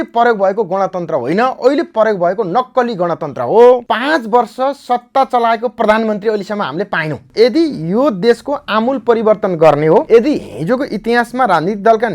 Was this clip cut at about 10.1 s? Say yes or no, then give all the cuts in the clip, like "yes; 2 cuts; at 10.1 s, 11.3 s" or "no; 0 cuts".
yes; 3 cuts; at 3.9 s, 7.3 s, 10.1 s